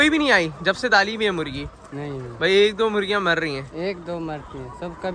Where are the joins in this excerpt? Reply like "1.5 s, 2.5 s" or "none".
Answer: none